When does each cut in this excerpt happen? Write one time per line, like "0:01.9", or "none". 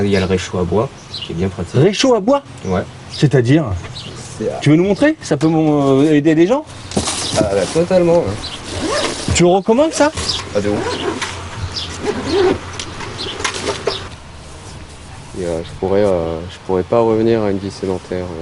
0:14.1